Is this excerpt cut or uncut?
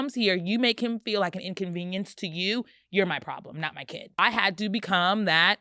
cut